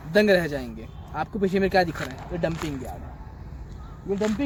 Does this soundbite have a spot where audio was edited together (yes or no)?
no